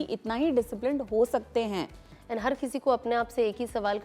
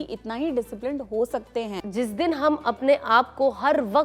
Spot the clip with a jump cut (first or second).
second